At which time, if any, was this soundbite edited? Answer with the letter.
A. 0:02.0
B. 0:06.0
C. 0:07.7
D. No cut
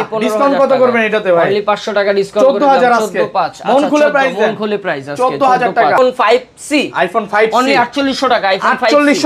B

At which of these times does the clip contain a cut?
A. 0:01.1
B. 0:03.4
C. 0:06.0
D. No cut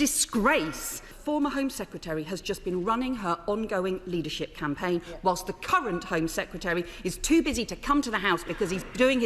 A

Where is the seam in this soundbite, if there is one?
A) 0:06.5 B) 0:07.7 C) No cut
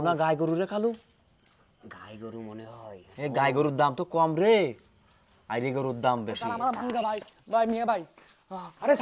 A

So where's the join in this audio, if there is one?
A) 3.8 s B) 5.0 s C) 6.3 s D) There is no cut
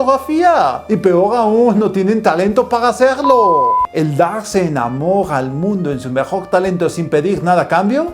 A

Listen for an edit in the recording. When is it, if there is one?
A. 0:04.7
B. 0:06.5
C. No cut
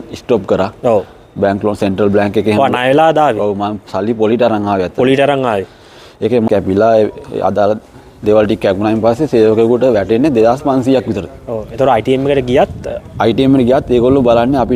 B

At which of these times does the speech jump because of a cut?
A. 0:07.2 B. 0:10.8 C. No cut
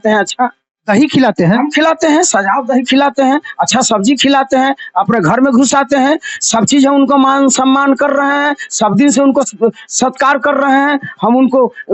C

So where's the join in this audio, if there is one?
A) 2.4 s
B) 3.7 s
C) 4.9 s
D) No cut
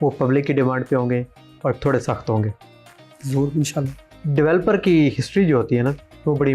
D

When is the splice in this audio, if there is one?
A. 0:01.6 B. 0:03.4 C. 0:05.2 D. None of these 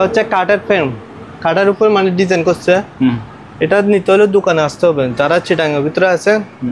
D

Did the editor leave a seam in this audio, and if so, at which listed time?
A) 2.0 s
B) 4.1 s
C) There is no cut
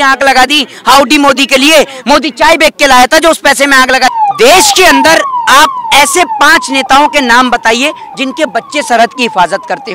B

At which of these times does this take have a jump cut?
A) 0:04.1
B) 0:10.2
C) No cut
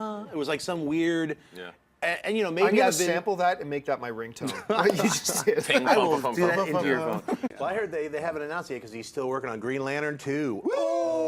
C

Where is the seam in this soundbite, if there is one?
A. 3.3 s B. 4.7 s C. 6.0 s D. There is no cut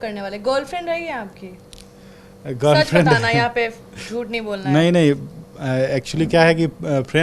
D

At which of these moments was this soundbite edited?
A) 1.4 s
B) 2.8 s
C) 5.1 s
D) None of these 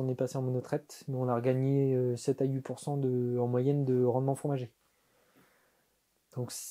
D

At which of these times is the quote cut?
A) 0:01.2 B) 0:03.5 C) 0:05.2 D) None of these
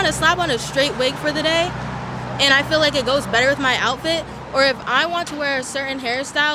D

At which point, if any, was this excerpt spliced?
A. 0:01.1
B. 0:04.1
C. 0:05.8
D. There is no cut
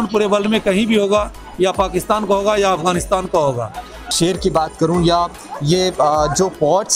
B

